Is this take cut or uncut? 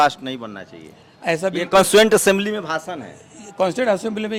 uncut